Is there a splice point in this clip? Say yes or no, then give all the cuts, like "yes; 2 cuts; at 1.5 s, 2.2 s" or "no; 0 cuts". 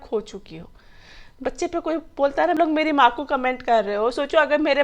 yes; 1 cut; at 2.6 s